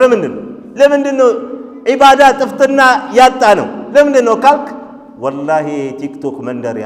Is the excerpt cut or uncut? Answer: uncut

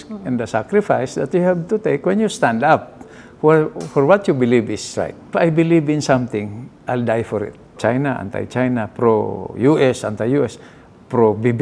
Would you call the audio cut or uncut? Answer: cut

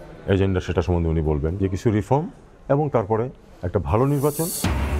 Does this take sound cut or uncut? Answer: uncut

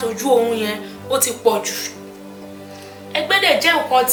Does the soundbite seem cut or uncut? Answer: uncut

